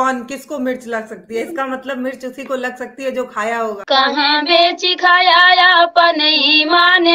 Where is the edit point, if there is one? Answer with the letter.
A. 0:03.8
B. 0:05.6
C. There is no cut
A